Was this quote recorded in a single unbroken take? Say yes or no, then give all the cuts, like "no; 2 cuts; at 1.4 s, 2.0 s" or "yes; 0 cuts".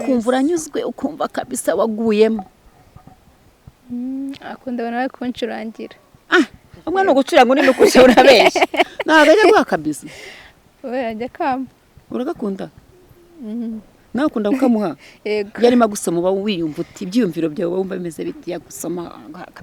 yes; 0 cuts